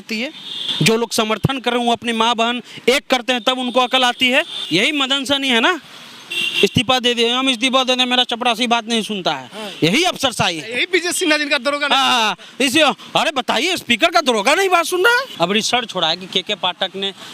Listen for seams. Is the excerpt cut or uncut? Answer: cut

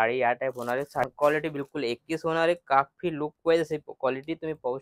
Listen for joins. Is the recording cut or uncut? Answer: cut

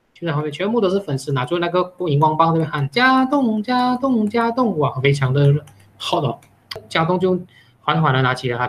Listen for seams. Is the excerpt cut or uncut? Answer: cut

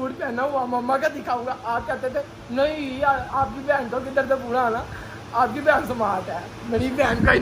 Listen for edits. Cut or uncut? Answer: uncut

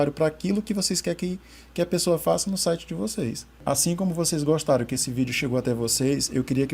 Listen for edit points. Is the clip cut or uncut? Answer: cut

